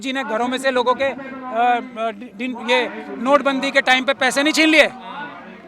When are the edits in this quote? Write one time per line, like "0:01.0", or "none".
none